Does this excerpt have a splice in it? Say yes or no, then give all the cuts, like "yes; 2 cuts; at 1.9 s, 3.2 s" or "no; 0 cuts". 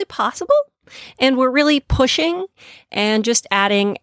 no; 0 cuts